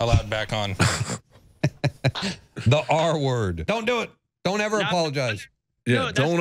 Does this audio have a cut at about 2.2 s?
no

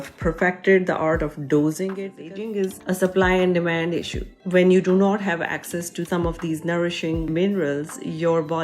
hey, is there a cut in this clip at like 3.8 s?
no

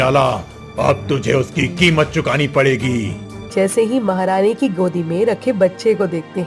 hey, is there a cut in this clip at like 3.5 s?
yes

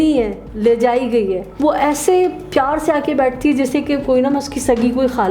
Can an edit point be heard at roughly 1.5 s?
yes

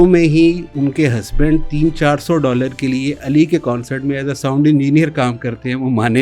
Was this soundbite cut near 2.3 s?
no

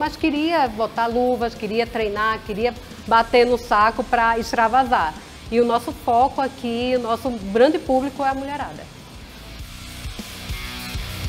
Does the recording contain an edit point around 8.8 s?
no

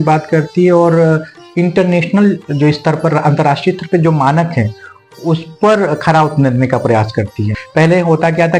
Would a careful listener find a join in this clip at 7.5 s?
yes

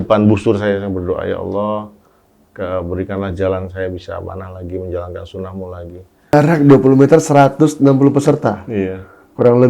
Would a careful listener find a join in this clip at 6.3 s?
yes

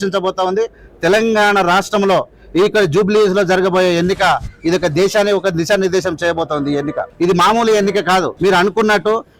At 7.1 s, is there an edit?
yes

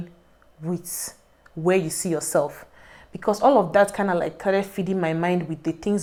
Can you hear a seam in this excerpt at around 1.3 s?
no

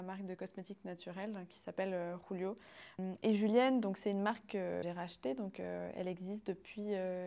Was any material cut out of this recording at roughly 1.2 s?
no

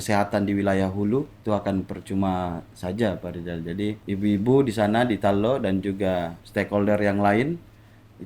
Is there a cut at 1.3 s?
yes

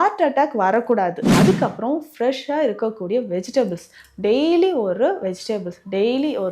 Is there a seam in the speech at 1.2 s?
yes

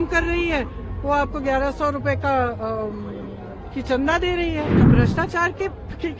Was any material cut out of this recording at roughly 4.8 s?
yes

